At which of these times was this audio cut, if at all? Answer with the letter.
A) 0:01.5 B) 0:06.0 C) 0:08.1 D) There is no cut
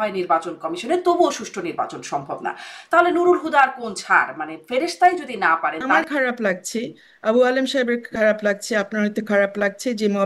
B